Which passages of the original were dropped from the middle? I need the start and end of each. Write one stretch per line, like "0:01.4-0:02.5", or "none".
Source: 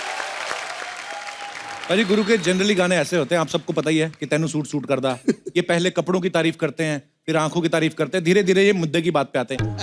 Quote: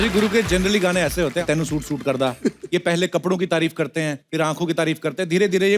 0:03.4-0:04.3
0:07.0-0:07.2